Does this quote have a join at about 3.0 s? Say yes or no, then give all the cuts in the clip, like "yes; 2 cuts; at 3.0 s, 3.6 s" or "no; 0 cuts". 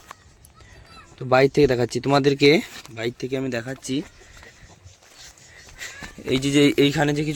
no; 0 cuts